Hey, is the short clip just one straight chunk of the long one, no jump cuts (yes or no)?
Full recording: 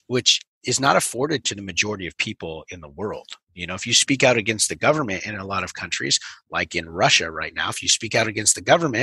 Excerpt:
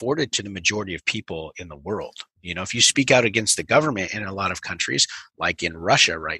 yes